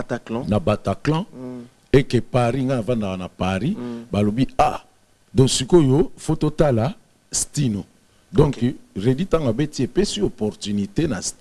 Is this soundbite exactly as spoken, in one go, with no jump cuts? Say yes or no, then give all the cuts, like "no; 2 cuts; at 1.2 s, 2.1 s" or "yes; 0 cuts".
yes; 0 cuts